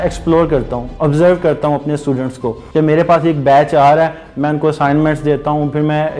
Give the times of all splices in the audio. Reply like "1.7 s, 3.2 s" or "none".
2.5 s